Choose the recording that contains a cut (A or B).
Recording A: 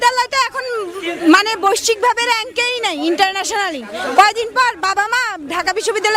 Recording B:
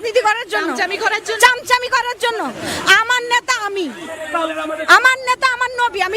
B